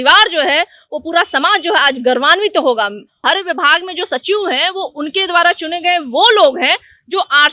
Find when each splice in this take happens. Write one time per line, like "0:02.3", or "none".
0:03.2